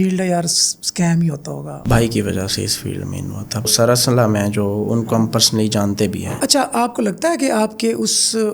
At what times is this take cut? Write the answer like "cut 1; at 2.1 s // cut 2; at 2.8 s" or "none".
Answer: cut 1; at 1.7 s // cut 2; at 3.7 s // cut 3; at 6.3 s